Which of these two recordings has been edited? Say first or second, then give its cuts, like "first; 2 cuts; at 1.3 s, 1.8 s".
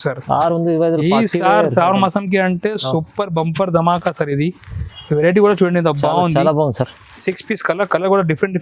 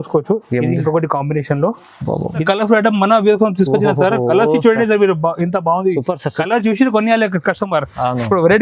second; 1 cut; at 2.4 s